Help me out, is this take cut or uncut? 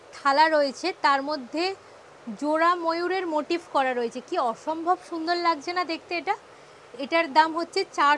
uncut